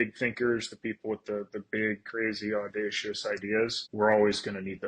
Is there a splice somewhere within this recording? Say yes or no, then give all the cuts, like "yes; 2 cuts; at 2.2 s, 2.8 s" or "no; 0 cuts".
yes; 1 cut; at 3.8 s